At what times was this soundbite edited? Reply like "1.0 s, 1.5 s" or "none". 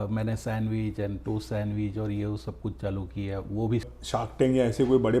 3.9 s